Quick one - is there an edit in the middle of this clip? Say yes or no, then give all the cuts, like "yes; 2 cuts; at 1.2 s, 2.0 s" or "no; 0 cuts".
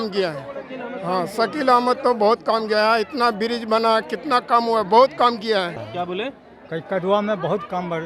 yes; 1 cut; at 5.8 s